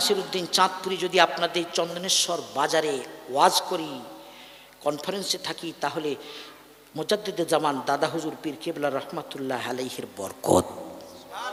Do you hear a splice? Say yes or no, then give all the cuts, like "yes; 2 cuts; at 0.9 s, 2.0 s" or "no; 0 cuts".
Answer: no; 0 cuts